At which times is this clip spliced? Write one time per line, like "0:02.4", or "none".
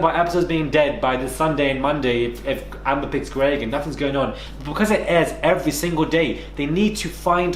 0:04.5